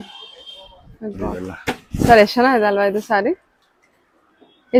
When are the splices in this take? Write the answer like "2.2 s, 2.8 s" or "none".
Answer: none